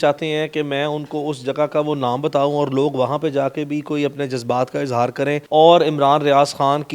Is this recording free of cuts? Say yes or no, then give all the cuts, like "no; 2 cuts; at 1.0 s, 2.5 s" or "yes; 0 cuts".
no; 1 cut; at 5.4 s